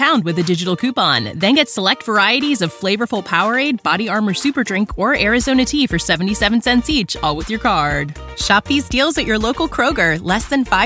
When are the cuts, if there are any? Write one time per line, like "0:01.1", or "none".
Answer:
none